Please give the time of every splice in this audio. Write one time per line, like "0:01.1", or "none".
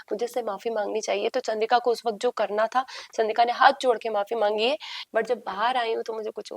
0:04.9